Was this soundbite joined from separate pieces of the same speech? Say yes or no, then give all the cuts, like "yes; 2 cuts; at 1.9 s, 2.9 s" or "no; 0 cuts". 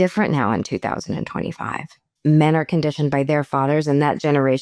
yes; 1 cut; at 2.1 s